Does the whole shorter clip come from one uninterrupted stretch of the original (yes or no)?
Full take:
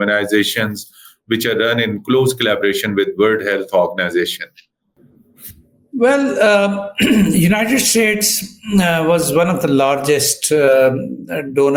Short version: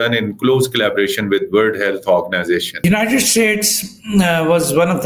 no